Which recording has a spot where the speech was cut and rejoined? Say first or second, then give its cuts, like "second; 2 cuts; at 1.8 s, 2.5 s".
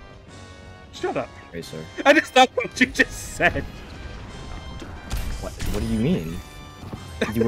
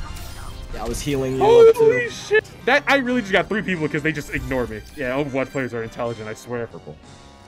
second; 2 cuts; at 2.4 s, 6.7 s